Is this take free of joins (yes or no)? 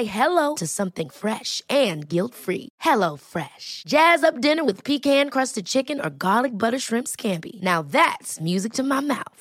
yes